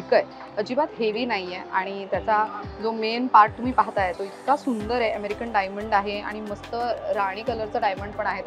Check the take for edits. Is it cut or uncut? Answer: uncut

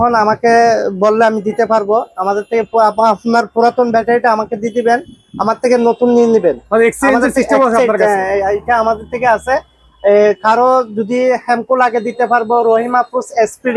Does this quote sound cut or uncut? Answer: uncut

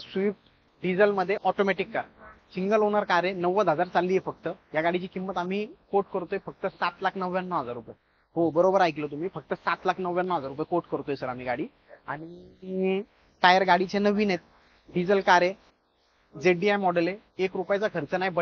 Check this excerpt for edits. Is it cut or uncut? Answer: uncut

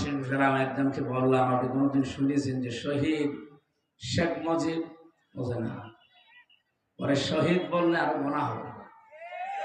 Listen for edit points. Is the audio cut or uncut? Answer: uncut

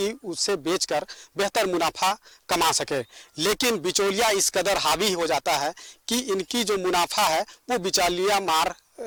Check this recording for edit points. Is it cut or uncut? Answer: uncut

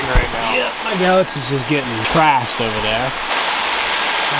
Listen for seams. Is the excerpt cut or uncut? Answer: cut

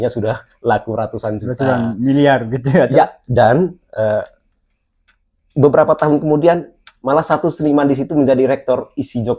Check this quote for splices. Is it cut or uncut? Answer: uncut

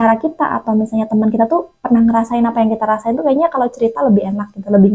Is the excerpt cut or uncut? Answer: uncut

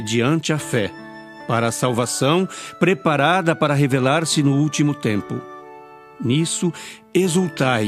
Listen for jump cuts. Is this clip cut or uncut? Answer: cut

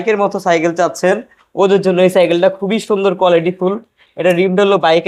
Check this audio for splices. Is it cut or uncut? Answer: uncut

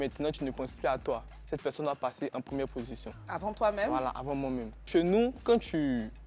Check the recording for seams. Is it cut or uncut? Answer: cut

